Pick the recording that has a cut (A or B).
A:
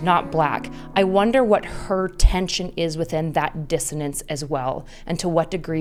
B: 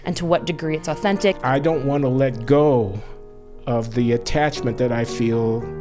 B